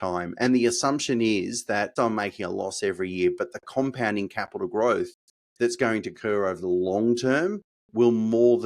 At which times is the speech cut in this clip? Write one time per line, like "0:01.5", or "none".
0:01.9